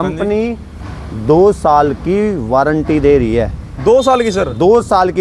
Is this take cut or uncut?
uncut